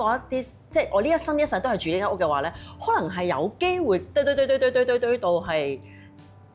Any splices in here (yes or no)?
no